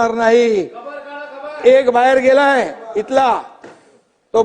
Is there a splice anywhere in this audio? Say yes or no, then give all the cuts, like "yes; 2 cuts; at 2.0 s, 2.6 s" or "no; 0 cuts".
no; 0 cuts